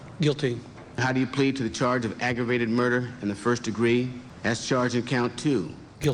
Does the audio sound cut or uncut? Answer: cut